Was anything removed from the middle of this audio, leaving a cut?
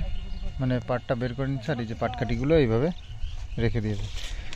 no; 0 cuts

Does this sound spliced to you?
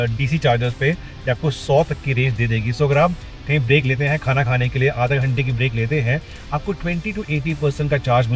no; 0 cuts

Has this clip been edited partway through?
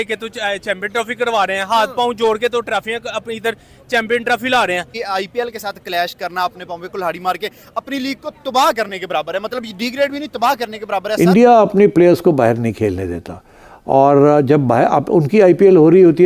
yes; 1 cut; at 11.0 s

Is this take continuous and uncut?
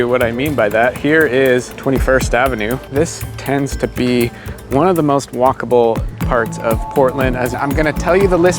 no; 3 cuts; at 1.7 s, 2.9 s, 7.6 s

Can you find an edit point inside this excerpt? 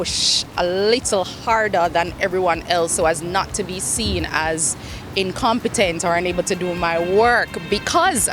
no; 0 cuts

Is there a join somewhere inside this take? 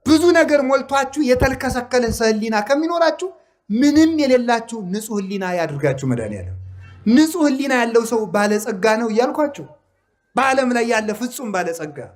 no; 0 cuts

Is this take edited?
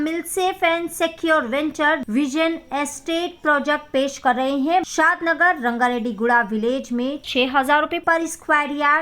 yes; 2 cuts; at 2.0 s, 4.9 s

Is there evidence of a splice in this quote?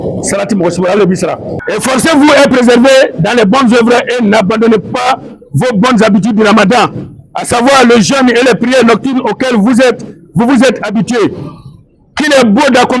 yes; 1 cut; at 1.5 s

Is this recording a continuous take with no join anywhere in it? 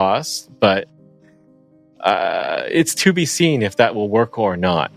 yes; 0 cuts

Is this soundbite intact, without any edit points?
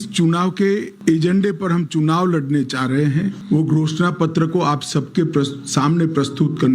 no; 2 cuts; at 0.9 s, 3.4 s

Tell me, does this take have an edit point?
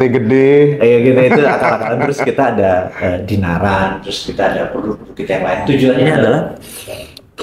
no; 0 cuts

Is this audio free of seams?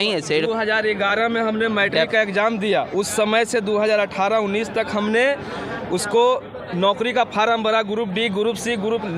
yes; 0 cuts

